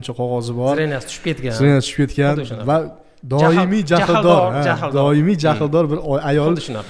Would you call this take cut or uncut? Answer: uncut